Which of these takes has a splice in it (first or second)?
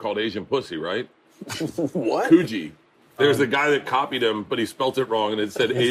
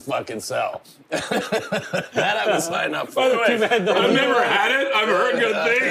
first